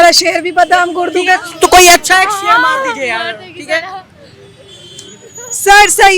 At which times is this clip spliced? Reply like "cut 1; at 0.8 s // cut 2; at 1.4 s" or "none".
none